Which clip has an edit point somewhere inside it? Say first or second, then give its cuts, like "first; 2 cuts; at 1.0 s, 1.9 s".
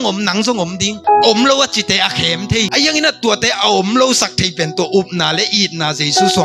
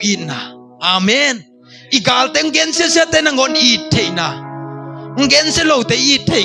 first; 2 cuts; at 0.9 s, 2.7 s